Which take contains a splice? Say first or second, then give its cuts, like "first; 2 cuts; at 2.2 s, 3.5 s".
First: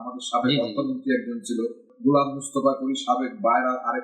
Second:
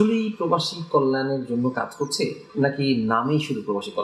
first; 1 cut; at 1.9 s